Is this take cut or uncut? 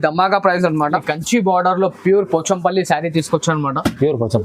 cut